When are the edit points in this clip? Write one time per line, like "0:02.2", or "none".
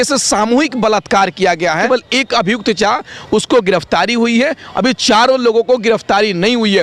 0:01.8